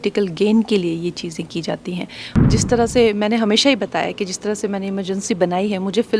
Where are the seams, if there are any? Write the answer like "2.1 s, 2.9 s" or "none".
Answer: 2.5 s